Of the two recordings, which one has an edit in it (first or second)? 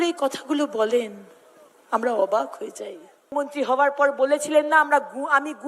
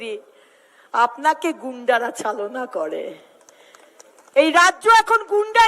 first